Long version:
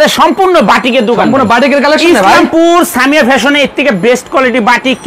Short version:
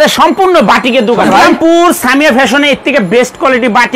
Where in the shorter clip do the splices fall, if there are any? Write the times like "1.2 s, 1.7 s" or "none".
1.3 s